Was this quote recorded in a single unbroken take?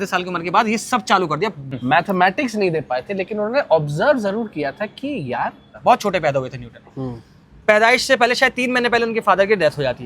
no; 2 cuts; at 1.7 s, 5.7 s

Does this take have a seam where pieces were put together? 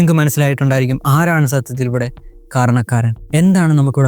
yes; 1 cut; at 3.2 s

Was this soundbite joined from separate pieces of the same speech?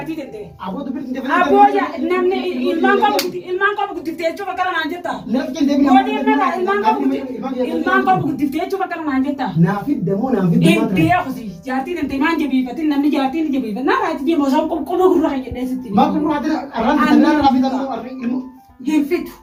no; 0 cuts

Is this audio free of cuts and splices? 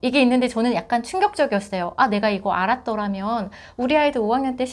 yes; 0 cuts

